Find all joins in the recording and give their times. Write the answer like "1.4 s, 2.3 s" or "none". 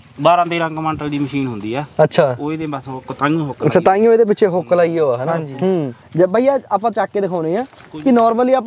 6.0 s